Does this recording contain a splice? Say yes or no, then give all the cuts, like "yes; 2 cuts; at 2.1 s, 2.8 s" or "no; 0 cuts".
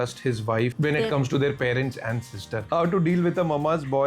yes; 1 cut; at 2.6 s